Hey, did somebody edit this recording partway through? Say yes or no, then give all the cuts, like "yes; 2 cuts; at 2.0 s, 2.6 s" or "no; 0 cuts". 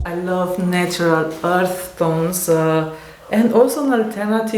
no; 0 cuts